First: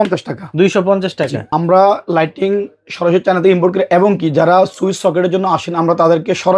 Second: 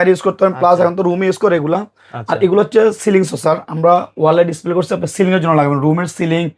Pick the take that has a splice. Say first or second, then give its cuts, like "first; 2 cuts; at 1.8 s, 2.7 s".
first; 1 cut; at 1.5 s